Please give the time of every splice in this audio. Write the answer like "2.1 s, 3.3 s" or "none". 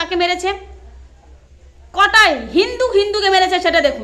none